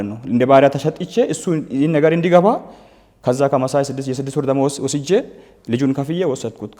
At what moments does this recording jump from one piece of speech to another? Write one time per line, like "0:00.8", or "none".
none